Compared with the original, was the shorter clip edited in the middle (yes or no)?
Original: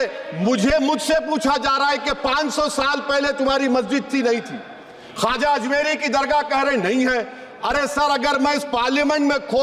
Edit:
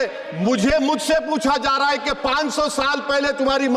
no